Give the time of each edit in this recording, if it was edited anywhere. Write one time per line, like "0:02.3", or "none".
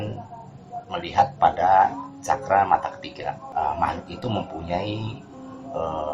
0:03.4